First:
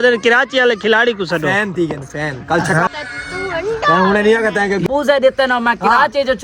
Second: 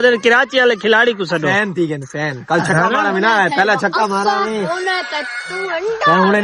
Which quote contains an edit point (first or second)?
first